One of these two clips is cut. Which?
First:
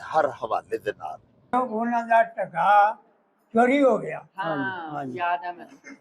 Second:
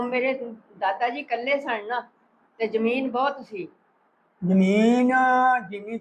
first; 1 cut; at 1.5 s

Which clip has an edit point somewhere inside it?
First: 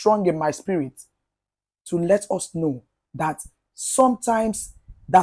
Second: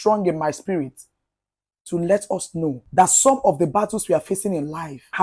second; 1 cut; at 2.8 s

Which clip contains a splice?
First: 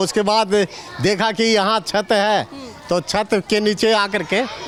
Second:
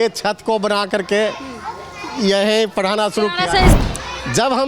second; 1 cut; at 3.7 s

